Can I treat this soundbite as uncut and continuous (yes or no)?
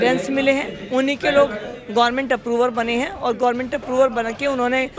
yes